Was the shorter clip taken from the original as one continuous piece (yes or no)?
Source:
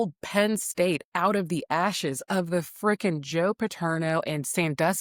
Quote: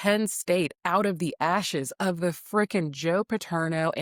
yes